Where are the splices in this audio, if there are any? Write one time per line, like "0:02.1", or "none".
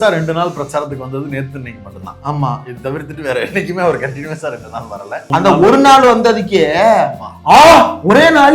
0:05.2